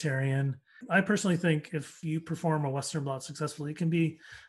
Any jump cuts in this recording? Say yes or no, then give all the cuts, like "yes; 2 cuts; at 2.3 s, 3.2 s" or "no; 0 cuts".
yes; 2 cuts; at 0.8 s, 2.0 s